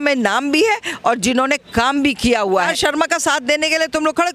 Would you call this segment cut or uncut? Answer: cut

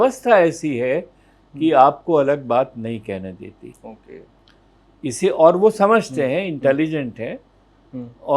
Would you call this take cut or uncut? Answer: cut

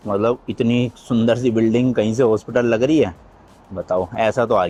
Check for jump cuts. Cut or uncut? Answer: uncut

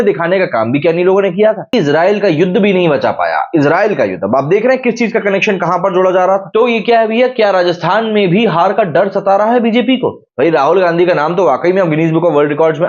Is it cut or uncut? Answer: cut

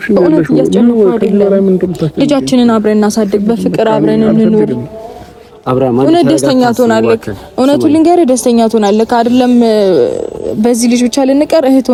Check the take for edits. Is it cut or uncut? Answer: uncut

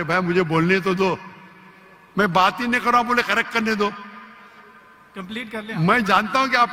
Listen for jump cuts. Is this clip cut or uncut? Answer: uncut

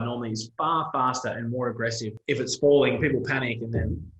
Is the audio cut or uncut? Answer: cut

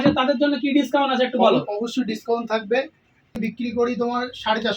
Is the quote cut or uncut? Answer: cut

